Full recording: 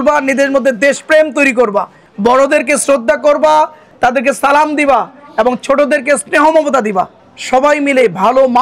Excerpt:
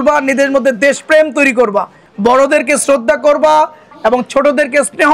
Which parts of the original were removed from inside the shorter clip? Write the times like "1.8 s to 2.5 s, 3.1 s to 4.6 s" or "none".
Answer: 3.8 s to 5.2 s

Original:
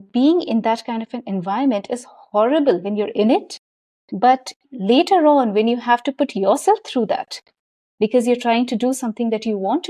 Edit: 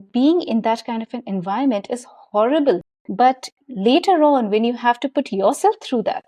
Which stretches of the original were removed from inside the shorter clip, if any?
2.9 s to 3.9 s

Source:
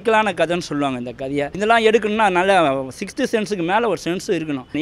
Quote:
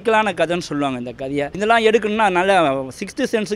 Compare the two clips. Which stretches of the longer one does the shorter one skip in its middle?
none

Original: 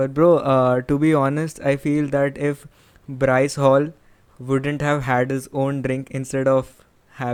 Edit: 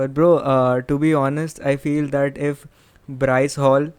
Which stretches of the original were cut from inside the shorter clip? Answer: none

